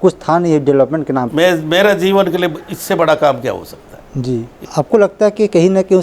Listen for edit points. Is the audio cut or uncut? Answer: cut